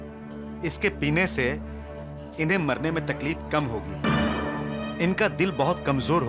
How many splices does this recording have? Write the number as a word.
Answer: one